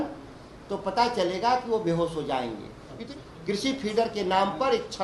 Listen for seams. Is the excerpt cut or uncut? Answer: cut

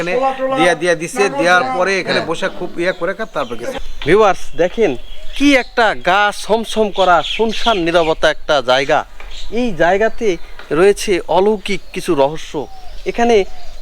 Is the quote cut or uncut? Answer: uncut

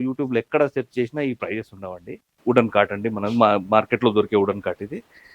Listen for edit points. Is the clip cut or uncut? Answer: cut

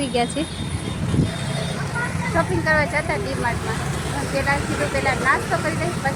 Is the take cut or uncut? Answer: uncut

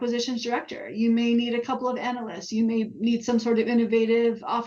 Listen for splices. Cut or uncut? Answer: uncut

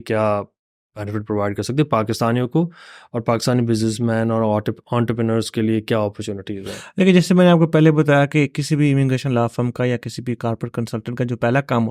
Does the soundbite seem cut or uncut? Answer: uncut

